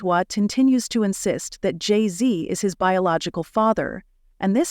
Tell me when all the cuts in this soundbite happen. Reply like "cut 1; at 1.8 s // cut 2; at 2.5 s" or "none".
cut 1; at 3.0 s